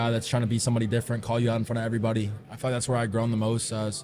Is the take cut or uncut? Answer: cut